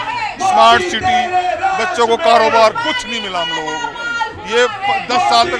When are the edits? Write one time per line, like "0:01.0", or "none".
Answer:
none

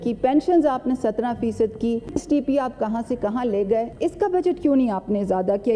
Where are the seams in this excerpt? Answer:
0:02.1
0:03.9

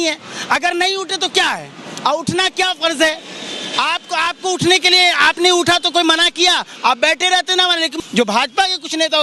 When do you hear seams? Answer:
0:08.0

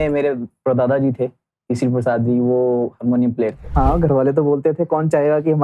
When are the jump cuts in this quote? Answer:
0:03.6

